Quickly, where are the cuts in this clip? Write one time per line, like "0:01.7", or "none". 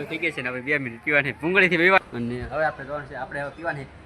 0:02.0